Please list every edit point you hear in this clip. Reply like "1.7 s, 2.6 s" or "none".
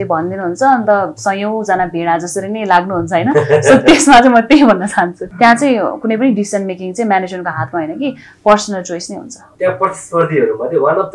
5.2 s, 9.4 s